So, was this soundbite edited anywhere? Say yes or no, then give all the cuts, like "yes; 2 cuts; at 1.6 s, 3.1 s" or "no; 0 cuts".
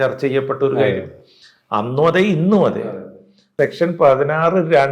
yes; 1 cut; at 3.5 s